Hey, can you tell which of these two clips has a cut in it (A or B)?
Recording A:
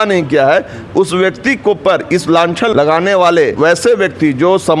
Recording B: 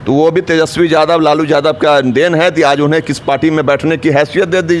A